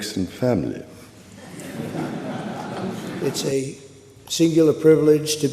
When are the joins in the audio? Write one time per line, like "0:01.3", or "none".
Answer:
0:03.2